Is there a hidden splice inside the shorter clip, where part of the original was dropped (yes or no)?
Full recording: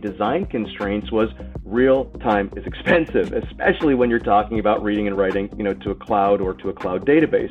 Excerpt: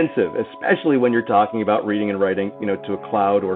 no